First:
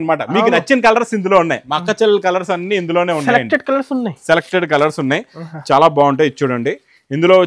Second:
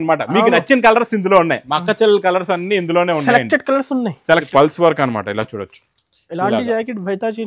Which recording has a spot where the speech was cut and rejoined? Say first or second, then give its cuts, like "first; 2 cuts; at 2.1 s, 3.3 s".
second; 1 cut; at 4.5 s